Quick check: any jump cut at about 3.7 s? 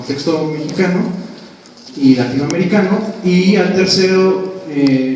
no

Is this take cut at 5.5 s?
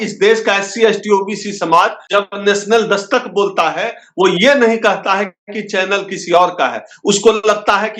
no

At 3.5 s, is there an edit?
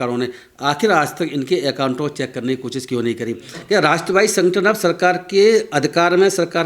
yes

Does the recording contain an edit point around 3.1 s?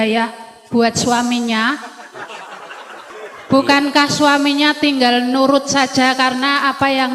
yes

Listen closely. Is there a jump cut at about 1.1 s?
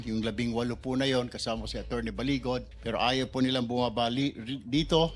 no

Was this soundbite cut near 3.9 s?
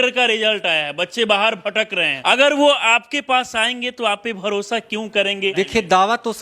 no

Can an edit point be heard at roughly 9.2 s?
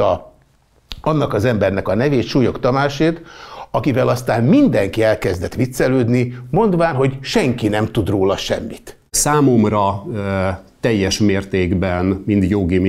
yes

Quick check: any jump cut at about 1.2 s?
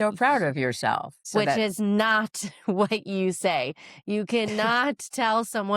yes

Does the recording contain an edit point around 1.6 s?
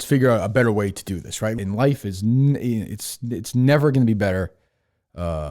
yes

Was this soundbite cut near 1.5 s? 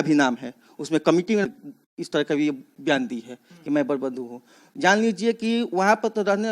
yes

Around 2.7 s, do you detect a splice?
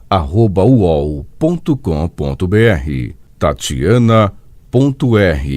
yes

